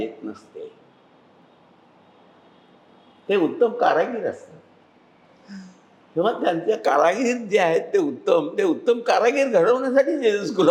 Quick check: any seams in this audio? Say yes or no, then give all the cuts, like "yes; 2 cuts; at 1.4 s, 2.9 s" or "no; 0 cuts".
no; 0 cuts